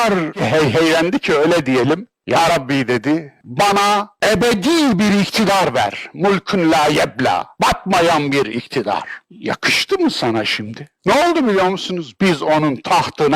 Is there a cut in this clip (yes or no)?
no